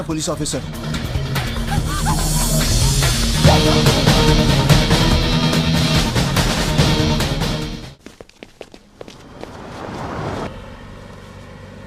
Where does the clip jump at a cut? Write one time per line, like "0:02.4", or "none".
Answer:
0:10.5